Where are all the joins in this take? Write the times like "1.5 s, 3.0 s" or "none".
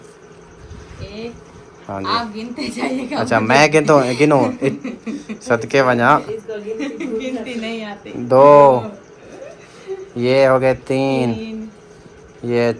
none